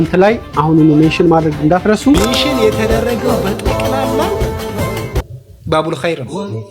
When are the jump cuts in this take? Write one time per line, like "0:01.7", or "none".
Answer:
0:02.2